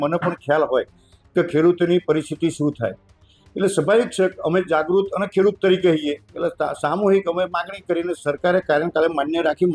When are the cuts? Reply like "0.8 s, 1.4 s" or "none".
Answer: none